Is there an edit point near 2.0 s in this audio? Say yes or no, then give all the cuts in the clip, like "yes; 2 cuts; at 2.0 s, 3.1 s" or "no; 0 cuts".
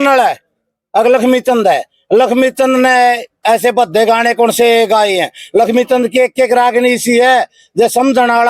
no; 0 cuts